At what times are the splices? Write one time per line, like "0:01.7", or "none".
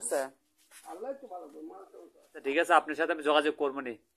0:02.4